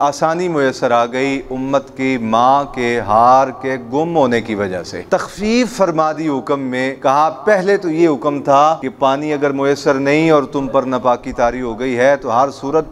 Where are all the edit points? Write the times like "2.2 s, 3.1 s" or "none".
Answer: 5.0 s, 6.9 s, 8.9 s